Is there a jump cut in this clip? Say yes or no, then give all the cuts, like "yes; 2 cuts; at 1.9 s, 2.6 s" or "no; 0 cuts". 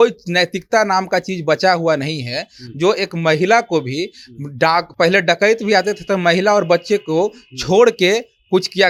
no; 0 cuts